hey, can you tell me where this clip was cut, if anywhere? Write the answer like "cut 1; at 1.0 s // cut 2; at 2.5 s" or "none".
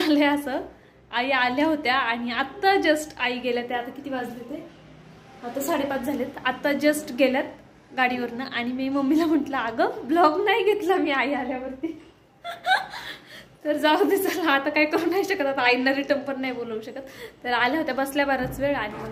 none